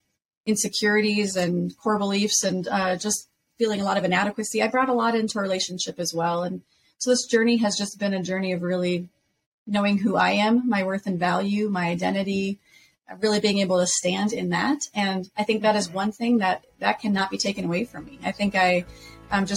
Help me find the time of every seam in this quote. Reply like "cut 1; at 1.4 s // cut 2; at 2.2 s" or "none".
none

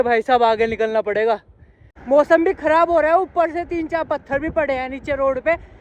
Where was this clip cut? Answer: cut 1; at 1.9 s

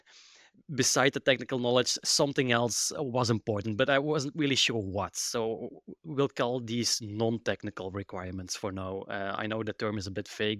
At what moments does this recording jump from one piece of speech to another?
none

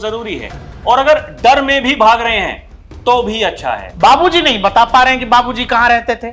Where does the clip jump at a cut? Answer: cut 1; at 3.9 s

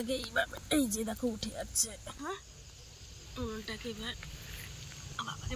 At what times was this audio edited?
cut 1; at 2.1 s

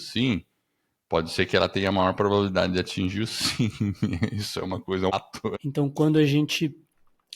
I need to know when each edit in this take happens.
cut 1; at 5.3 s

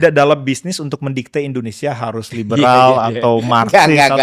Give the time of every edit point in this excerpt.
none

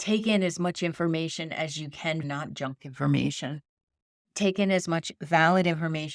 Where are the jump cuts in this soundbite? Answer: cut 1; at 2.2 s

